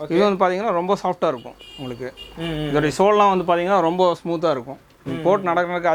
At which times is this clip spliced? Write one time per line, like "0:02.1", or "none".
none